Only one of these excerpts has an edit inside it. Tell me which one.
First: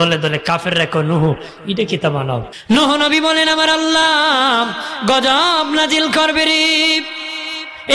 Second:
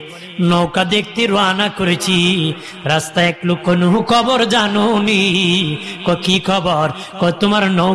first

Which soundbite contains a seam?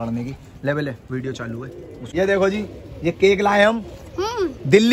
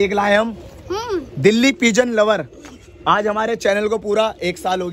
first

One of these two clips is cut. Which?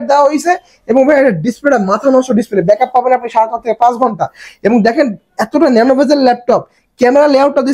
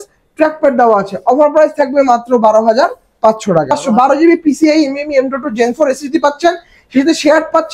second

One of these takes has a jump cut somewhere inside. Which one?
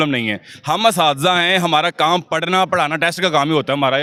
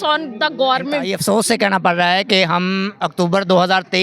second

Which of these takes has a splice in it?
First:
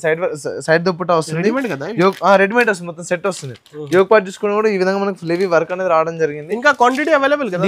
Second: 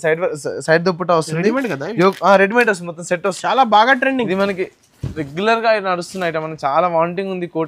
second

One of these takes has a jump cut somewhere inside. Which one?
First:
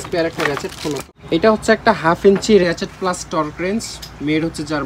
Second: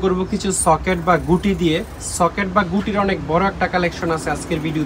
first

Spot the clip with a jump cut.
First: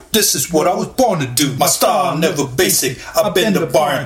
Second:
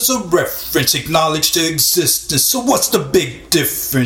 first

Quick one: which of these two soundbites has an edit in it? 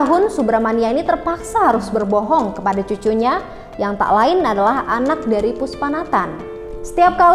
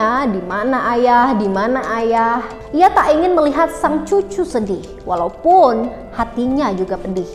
second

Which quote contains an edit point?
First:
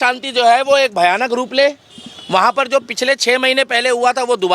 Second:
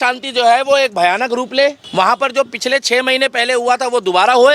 second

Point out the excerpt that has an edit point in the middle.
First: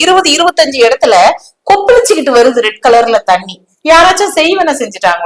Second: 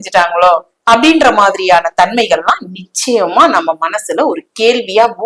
first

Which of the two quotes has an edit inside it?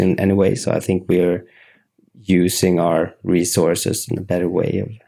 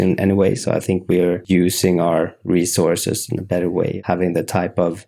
second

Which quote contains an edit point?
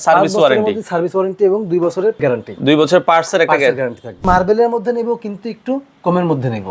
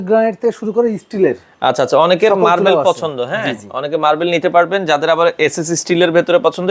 first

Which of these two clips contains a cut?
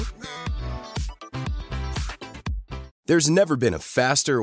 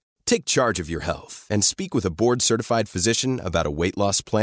first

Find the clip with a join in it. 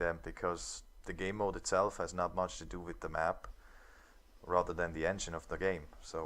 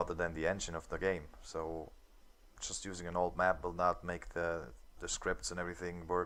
first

